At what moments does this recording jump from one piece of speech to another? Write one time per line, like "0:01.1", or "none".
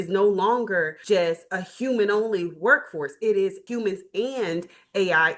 0:01.0
0:03.6